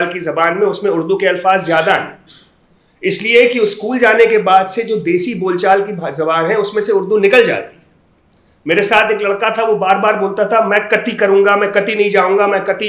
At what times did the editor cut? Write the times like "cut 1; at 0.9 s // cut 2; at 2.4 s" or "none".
none